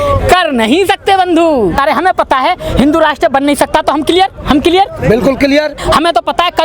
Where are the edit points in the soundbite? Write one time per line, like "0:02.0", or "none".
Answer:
0:01.8
0:05.8

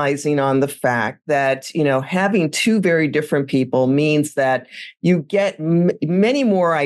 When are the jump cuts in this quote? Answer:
none

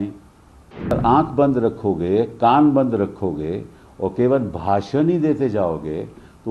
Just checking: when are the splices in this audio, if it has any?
0:00.9

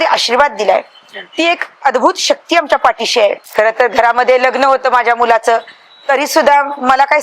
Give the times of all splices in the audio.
0:03.4

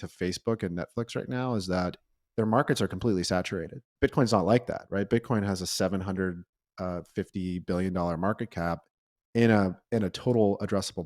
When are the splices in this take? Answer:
0:03.8

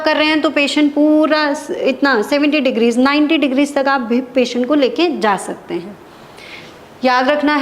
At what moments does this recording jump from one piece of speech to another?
none

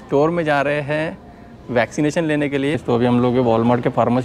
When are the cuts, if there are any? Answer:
0:02.8

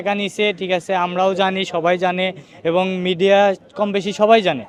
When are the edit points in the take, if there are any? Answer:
none

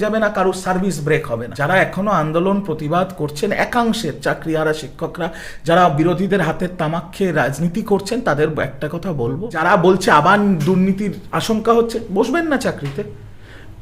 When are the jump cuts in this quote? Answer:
0:01.5
0:09.6

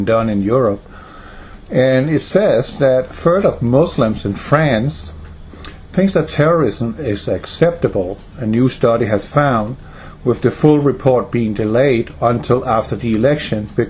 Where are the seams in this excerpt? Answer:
0:12.1

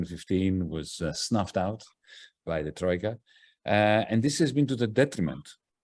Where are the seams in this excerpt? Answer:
none

